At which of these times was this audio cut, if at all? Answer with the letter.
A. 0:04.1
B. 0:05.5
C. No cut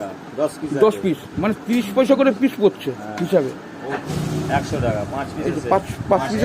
A